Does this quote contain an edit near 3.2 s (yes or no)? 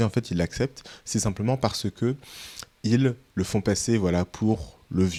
no